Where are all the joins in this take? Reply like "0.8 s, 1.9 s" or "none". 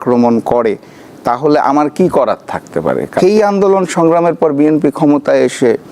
3.2 s